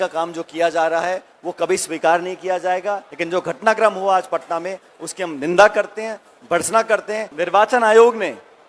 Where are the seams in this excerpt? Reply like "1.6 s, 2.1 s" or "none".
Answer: 3.1 s, 7.3 s

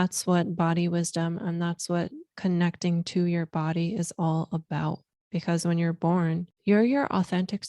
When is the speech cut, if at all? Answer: 5.1 s, 6.5 s

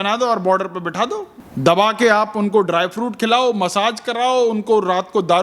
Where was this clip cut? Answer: 1.4 s

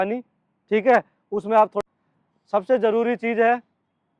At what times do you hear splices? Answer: 1.8 s

